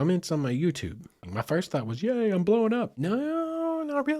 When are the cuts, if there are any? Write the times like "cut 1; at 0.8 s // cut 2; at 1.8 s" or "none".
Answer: cut 1; at 1.2 s // cut 2; at 2.9 s